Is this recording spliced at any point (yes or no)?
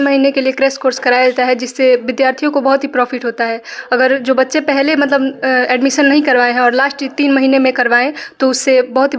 no